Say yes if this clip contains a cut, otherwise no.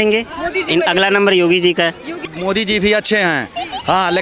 yes